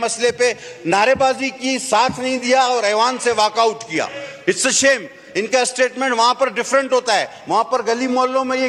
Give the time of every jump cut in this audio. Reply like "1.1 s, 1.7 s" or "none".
none

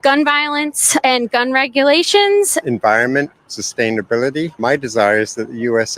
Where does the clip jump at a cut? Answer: 1.3 s

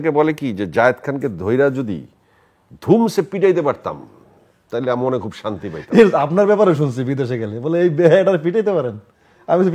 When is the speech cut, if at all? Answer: none

